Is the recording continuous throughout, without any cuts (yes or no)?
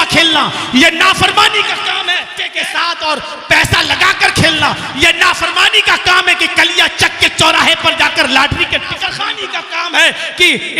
no